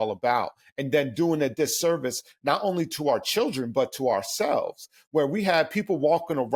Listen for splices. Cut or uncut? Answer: uncut